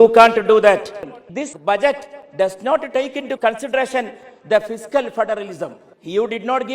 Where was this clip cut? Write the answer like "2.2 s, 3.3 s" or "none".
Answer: 1.0 s